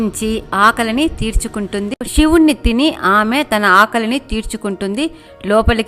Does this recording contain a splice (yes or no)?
yes